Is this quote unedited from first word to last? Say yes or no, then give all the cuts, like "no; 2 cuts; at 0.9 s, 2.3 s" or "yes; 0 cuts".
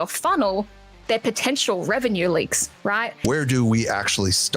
no; 1 cut; at 3.1 s